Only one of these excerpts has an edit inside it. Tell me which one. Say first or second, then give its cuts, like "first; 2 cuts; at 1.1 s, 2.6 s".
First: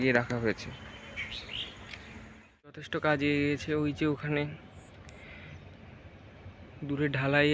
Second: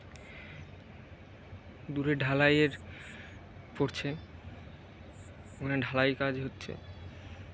first; 1 cut; at 2.8 s